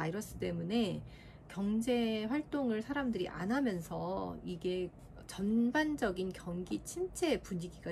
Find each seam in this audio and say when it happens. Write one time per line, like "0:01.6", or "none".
none